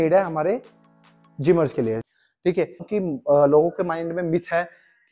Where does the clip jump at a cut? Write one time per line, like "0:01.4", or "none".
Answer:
0:02.0